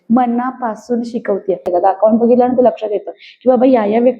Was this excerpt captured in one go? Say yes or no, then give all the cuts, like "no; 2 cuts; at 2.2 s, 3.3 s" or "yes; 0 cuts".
no; 1 cut; at 1.7 s